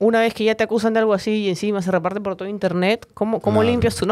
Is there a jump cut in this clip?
no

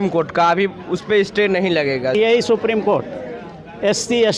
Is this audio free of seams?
no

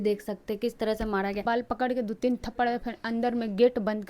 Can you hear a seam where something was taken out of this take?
yes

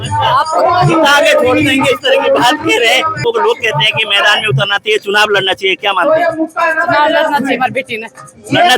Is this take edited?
yes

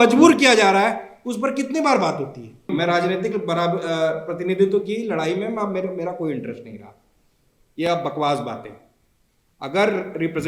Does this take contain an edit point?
yes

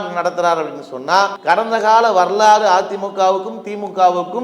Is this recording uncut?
no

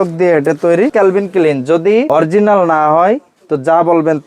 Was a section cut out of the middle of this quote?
yes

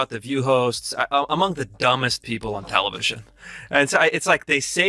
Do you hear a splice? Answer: no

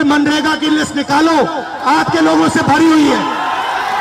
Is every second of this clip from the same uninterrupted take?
yes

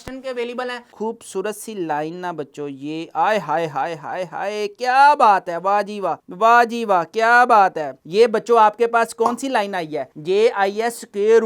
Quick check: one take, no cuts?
no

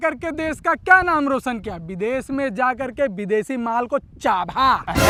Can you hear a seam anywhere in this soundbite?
no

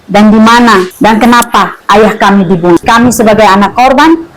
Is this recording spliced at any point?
yes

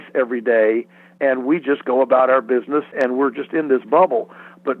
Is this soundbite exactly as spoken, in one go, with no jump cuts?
no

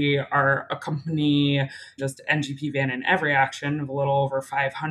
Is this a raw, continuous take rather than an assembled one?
yes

